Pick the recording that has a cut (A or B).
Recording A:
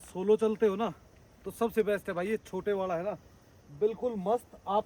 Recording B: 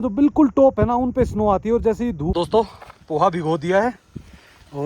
B